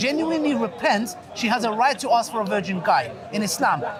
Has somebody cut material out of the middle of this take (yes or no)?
no